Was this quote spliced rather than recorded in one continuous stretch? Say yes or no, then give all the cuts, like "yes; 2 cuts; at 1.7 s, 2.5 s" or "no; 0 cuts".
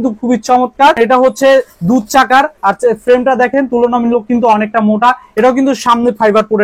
no; 0 cuts